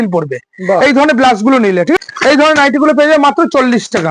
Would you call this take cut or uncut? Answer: cut